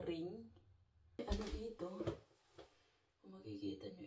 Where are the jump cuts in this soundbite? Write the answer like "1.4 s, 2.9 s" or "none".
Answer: 1.2 s